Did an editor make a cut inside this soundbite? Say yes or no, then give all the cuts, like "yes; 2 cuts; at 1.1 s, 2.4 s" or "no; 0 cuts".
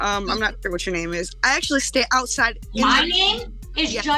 no; 0 cuts